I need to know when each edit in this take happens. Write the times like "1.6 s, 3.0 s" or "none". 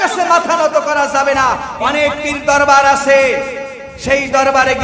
1.9 s